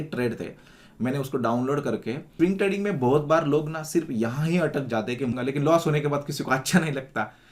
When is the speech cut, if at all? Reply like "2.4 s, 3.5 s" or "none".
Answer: 2.3 s, 5.4 s